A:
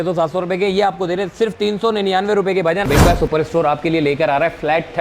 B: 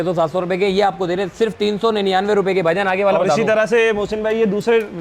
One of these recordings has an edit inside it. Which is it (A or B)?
A